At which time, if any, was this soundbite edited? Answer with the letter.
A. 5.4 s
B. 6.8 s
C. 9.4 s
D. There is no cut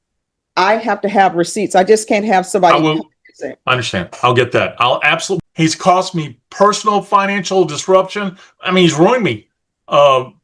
A